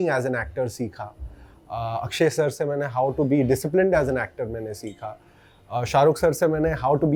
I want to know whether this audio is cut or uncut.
uncut